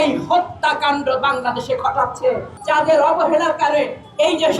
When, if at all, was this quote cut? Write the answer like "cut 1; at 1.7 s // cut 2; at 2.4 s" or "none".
cut 1; at 2.5 s